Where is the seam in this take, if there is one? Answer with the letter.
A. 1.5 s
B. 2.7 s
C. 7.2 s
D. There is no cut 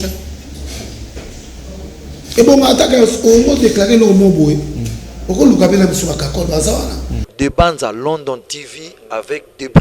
C